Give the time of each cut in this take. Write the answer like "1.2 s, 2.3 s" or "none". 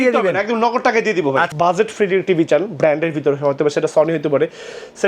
1.5 s